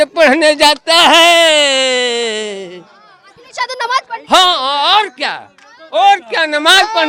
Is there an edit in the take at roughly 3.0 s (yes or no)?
no